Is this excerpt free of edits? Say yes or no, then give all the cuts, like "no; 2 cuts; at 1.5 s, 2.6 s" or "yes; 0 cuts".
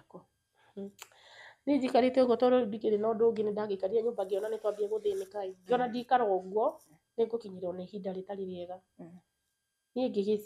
yes; 0 cuts